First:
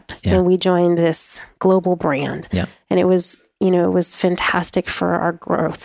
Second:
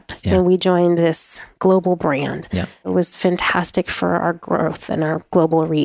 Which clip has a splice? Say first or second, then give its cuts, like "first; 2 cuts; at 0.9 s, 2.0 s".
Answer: second; 1 cut; at 2.9 s